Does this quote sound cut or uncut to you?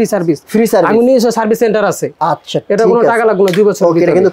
uncut